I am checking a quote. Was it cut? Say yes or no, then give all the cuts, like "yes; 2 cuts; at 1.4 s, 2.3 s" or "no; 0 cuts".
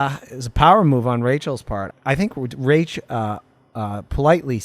yes; 1 cut; at 1.9 s